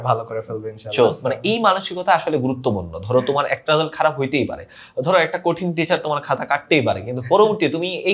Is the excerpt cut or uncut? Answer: uncut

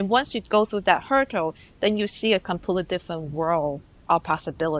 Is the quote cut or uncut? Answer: cut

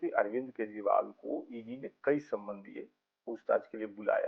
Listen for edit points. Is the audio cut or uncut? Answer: uncut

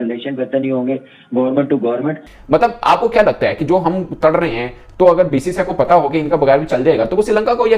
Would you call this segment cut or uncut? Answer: cut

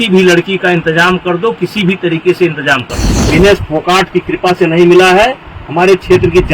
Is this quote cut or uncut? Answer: cut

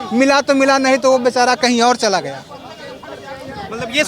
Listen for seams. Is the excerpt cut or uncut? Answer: uncut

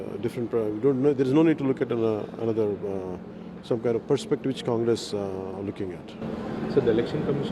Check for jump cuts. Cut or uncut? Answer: uncut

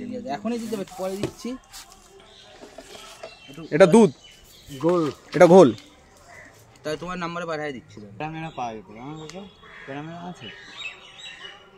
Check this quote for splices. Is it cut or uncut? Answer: cut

